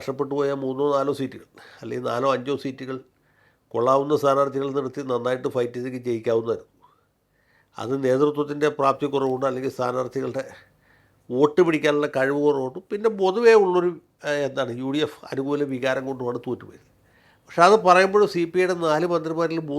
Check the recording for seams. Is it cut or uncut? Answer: uncut